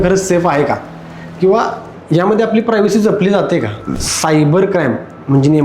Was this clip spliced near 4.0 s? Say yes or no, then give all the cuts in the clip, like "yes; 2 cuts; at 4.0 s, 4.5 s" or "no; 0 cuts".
yes; 1 cut; at 4.0 s